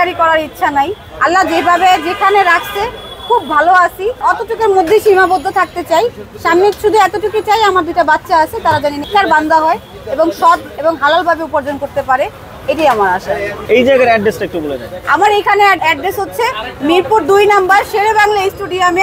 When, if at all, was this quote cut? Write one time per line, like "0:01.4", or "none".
none